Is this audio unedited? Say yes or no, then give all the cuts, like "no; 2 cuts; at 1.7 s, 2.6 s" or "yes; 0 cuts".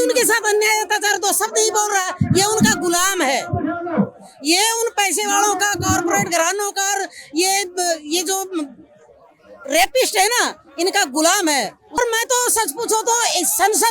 no; 1 cut; at 12.0 s